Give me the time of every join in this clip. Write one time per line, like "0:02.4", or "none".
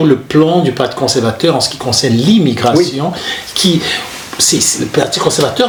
none